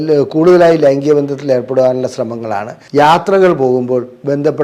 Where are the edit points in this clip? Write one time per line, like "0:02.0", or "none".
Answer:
0:02.7

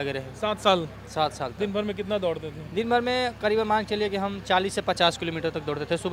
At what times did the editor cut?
none

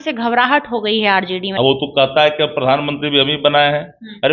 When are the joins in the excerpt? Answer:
0:01.5

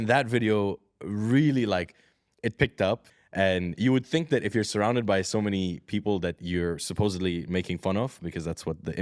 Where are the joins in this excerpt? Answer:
0:03.1

